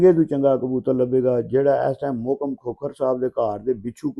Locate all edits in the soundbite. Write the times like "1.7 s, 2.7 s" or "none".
none